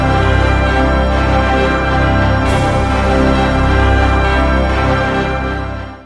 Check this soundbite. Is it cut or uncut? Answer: uncut